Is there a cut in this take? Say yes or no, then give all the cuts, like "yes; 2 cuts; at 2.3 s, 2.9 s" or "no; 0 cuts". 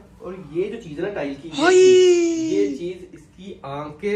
no; 0 cuts